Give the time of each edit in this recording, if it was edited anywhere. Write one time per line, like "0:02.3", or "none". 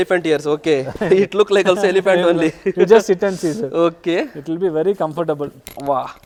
none